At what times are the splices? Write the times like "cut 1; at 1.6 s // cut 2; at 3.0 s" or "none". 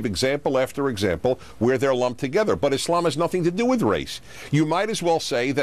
cut 1; at 2.7 s

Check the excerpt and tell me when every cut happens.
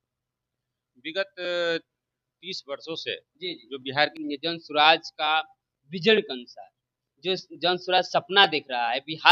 cut 1; at 4.2 s

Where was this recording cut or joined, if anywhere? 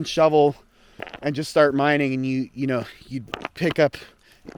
none

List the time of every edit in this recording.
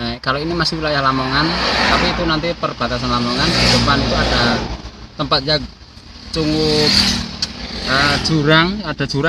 none

